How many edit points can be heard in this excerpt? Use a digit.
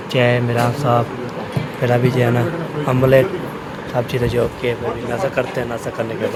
0